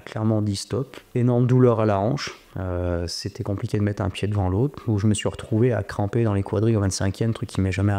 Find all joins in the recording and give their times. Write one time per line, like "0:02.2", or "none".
0:01.0
0:04.8